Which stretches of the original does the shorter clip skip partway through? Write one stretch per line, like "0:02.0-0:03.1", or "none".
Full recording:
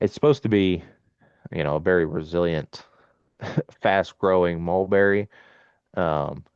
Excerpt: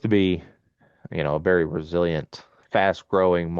0:03.0-0:03.7